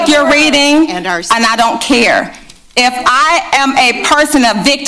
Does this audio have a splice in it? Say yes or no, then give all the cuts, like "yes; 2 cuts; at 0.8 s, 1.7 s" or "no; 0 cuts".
no; 0 cuts